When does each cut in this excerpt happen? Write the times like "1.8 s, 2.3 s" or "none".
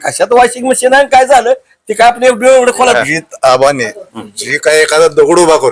2.9 s